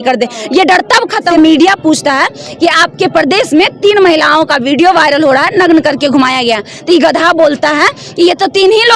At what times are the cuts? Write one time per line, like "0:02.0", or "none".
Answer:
0:01.3